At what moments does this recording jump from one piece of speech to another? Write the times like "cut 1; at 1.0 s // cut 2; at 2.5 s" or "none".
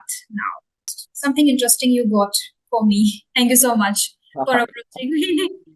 cut 1; at 1.1 s